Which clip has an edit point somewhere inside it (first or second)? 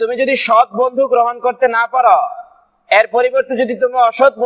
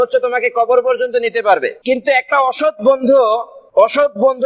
second